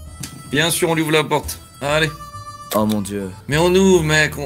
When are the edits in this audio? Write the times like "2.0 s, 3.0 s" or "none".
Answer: 3.4 s